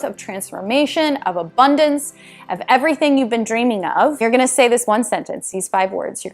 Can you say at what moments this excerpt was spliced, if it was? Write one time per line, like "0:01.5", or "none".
0:04.2